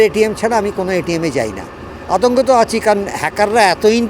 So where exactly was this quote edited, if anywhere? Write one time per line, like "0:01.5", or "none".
none

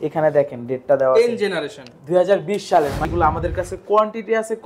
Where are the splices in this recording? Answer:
0:03.0

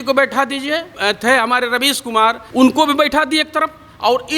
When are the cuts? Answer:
0:00.9
0:02.4

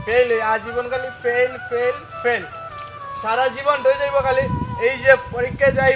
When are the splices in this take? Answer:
none

